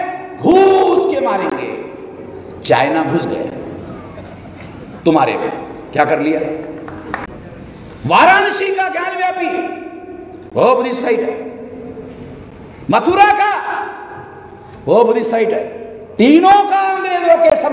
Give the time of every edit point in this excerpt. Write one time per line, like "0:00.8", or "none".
0:07.3

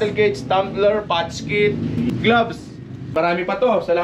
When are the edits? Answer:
0:02.1
0:03.1

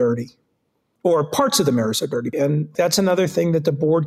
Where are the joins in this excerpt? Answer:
0:00.9
0:02.5

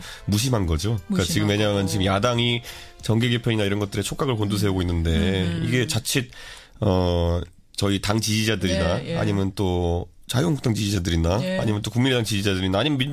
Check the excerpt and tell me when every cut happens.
0:01.0

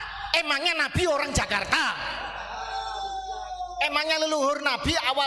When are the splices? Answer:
none

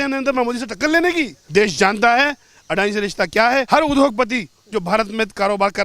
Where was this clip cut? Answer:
0:01.4
0:03.7

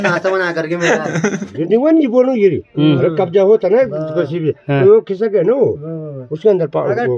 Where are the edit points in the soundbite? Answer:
0:01.5

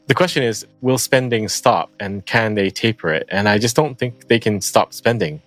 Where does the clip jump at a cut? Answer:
none

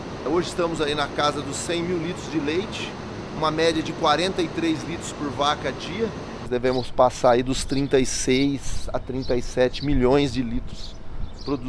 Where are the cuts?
0:06.5

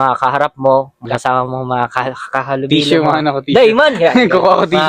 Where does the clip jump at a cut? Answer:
0:01.0

